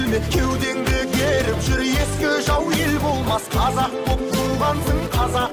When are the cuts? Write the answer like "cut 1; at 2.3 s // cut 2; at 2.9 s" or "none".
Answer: none